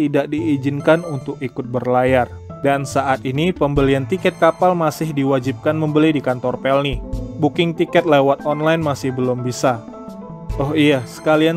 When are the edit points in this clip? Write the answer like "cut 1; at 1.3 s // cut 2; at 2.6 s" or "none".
cut 1; at 2.4 s